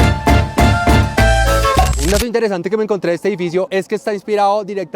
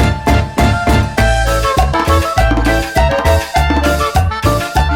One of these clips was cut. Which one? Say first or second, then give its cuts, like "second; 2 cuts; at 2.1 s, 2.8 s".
first; 1 cut; at 1.9 s